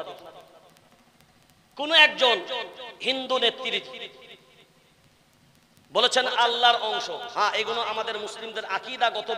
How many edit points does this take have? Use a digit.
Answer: 0